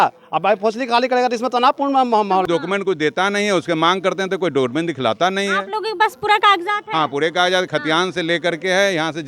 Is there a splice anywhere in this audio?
yes; 1 cut; at 2.5 s

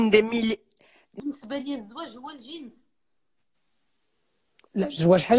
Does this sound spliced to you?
yes; 1 cut; at 1.0 s

